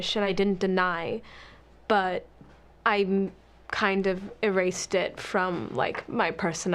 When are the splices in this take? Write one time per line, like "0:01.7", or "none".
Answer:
0:05.4